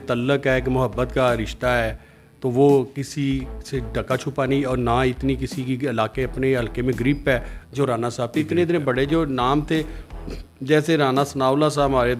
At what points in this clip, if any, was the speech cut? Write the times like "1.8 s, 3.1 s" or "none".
8.3 s